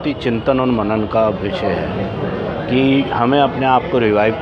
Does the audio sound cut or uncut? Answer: uncut